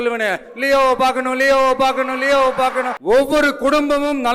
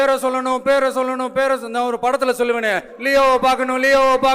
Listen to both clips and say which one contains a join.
first; 1 cut; at 2.9 s

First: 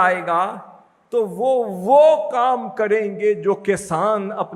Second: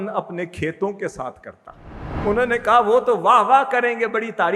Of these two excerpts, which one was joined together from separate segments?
second; 1 cut; at 2.1 s

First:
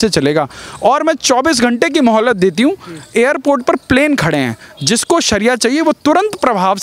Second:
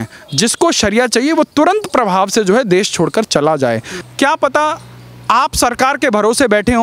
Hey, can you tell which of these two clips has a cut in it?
second; 1 cut; at 3.9 s

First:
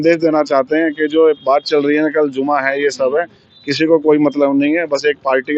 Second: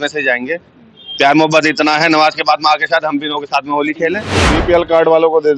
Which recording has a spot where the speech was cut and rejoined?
second; 1 cut; at 4.3 s

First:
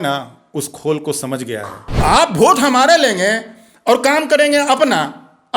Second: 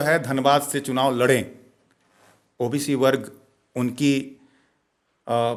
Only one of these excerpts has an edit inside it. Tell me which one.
first; 1 cut; at 2.0 s

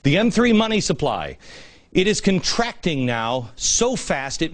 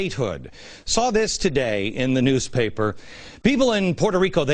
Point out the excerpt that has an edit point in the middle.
first; 1 cut; at 2.6 s

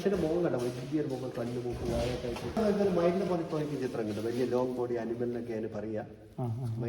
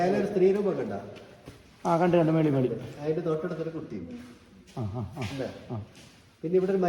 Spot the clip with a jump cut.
first; 1 cut; at 2.6 s

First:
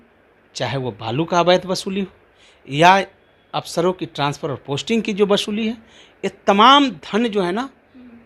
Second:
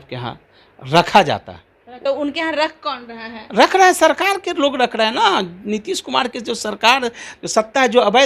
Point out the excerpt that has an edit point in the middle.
second; 1 cut; at 1.9 s

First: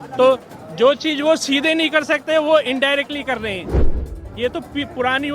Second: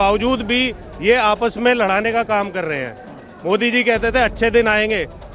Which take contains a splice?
first; 1 cut; at 4.0 s

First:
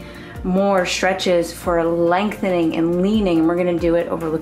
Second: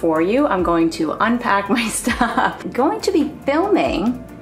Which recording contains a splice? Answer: second; 1 cut; at 2.6 s

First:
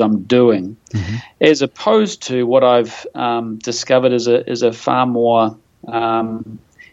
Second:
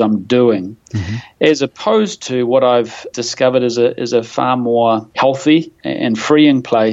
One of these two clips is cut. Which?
second; 3 cuts; at 3.1 s, 5.1 s, 5.8 s

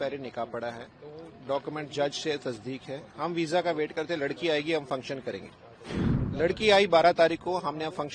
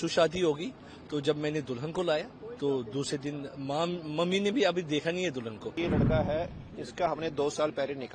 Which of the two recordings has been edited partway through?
second; 1 cut; at 5.7 s

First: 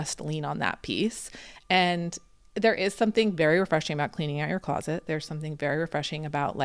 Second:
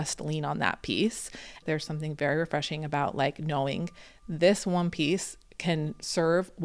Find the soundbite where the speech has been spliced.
second; 1 cut; at 1.6 s

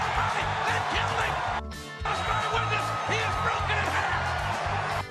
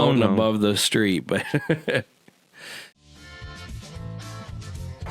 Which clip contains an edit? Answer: second; 1 cut; at 3.0 s

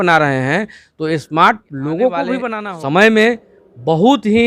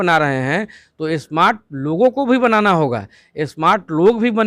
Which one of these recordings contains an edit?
first; 1 cut; at 2.5 s

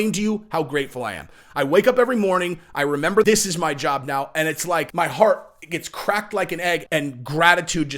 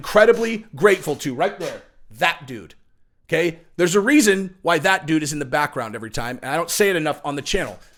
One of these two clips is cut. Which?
first; 3 cuts; at 3.2 s, 4.9 s, 6.8 s

